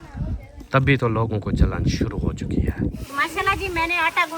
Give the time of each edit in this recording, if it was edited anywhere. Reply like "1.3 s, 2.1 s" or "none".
3.0 s